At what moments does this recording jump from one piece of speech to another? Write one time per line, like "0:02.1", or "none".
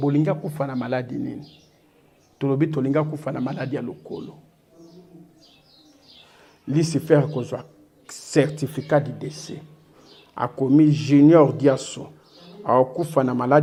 none